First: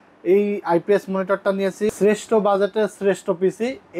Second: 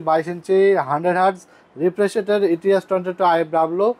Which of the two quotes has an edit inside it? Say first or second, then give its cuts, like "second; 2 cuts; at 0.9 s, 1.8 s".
first; 1 cut; at 1.9 s